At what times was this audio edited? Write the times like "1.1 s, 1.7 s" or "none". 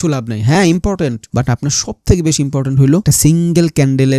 1.2 s, 3.0 s

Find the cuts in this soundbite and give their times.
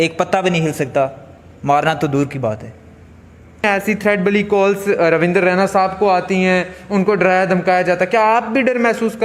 3.6 s

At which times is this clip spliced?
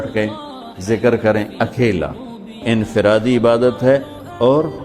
2.6 s

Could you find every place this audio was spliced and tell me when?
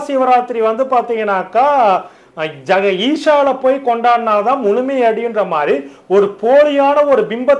none

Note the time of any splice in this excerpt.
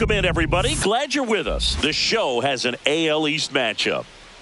none

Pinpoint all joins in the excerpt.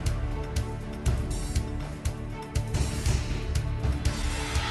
1.0 s

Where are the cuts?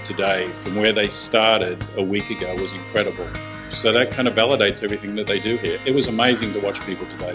5.8 s

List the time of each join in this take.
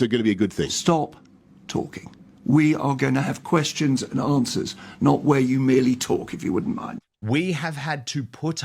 7.1 s

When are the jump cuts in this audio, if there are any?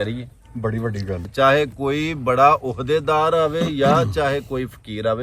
1.3 s

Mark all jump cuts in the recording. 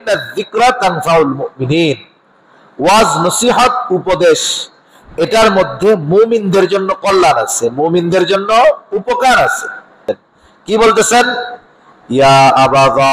10.0 s

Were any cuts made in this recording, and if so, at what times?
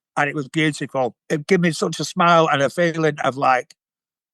1.2 s

